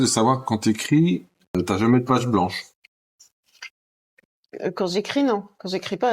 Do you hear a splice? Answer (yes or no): yes